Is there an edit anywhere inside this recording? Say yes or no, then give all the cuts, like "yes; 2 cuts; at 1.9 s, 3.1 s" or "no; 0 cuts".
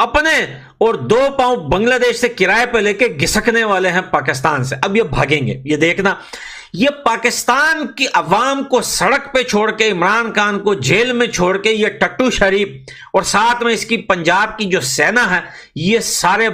no; 0 cuts